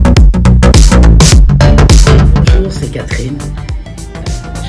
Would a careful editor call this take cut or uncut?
cut